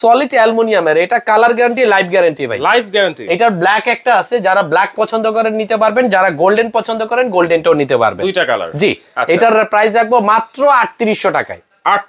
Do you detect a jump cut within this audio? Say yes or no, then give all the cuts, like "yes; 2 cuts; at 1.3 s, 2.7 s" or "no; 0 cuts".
no; 0 cuts